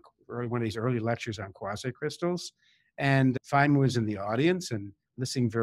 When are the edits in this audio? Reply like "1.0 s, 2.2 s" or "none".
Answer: 3.4 s